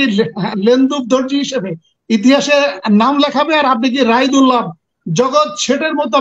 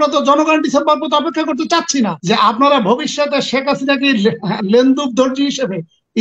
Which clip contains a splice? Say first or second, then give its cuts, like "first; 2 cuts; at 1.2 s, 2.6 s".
second; 1 cut; at 2.2 s